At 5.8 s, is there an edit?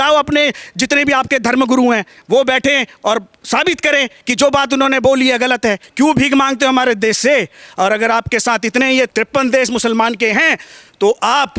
yes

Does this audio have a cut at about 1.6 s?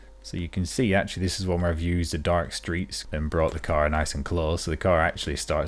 no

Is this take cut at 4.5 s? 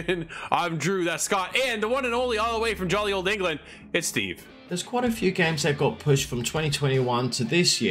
yes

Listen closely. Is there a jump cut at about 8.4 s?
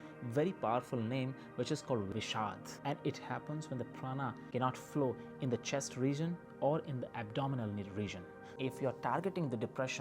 yes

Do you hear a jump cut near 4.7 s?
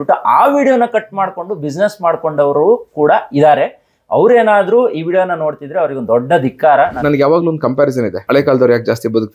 no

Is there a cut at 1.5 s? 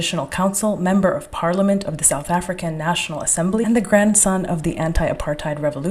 no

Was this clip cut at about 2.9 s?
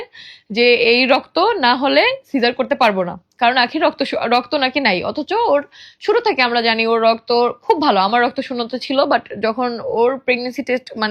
no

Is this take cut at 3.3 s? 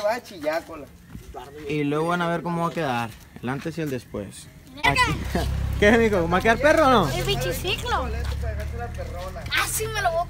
no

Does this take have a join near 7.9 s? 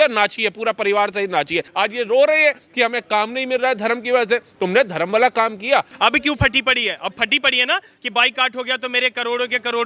no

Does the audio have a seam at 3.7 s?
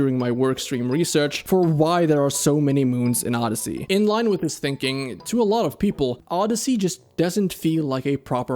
yes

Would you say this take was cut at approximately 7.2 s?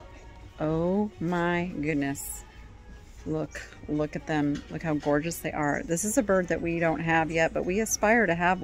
no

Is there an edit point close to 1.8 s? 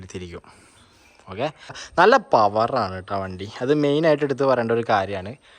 yes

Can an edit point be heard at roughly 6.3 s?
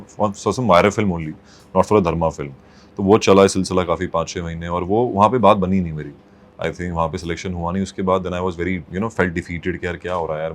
no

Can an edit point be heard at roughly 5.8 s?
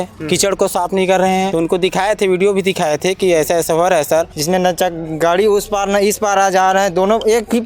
no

